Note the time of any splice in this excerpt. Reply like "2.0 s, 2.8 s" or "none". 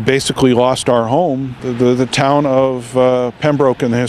1.6 s